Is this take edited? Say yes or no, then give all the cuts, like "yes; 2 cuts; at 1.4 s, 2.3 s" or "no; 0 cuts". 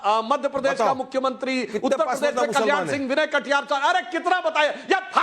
yes; 1 cut; at 3.0 s